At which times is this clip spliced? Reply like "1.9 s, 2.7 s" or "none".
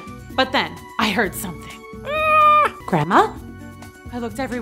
2.8 s